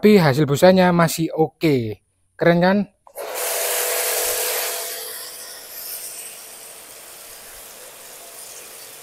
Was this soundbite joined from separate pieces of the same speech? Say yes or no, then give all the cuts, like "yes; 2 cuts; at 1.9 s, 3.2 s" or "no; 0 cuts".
no; 0 cuts